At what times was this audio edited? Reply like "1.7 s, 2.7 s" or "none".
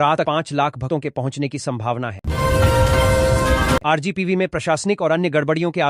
2.2 s, 3.8 s